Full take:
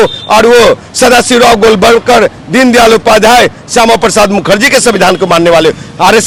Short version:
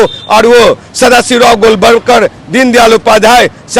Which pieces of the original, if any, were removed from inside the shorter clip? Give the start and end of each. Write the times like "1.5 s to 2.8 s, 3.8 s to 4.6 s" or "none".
none